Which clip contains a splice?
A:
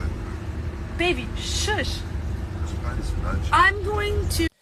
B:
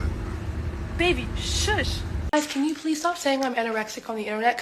B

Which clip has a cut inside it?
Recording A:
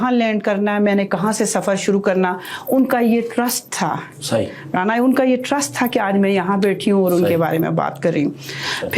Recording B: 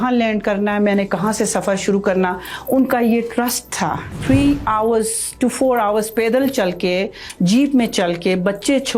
B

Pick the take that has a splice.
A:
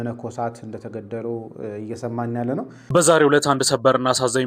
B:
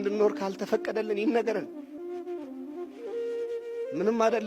A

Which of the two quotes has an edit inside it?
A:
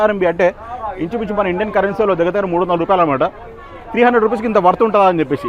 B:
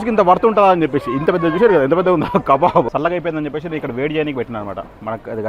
B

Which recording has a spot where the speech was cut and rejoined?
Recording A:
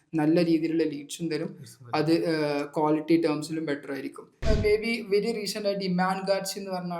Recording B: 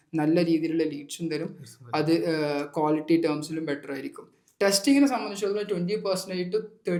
A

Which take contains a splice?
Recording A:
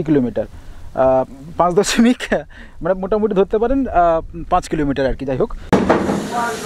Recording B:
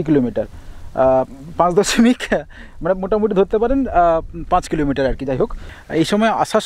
A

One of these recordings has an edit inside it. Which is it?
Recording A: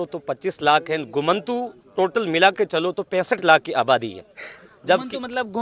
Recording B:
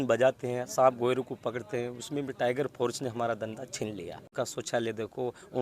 B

